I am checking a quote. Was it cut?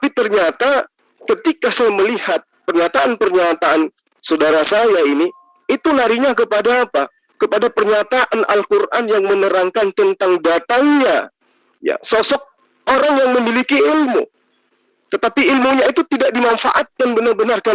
no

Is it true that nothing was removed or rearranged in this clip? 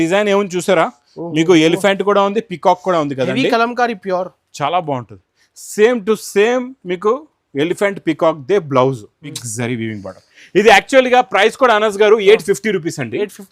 no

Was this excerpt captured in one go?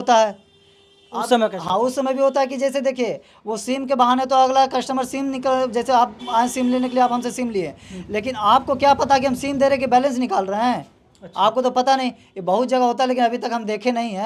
yes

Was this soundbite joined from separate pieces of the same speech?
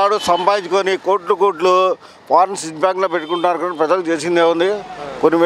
no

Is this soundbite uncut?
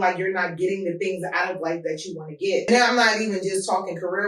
no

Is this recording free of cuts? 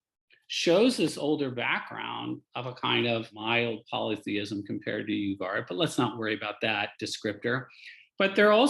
no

